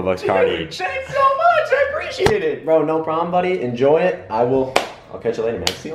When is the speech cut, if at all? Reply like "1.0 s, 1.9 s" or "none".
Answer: none